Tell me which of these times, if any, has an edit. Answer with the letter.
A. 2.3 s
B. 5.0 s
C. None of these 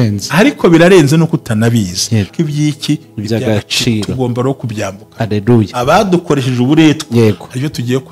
A